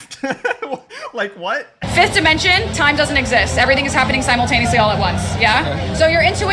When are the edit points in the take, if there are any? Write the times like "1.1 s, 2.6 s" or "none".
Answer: 1.8 s